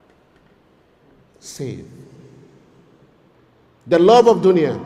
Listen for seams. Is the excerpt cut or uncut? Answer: cut